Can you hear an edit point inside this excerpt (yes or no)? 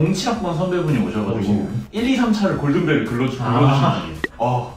no